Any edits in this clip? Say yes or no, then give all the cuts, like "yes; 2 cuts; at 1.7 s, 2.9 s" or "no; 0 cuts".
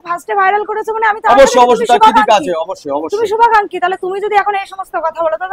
no; 0 cuts